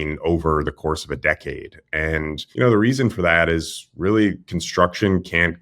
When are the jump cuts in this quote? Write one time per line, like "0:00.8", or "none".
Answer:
0:02.4